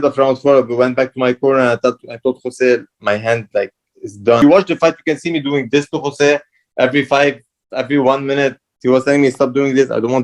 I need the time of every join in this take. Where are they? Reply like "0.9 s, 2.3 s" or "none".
4.4 s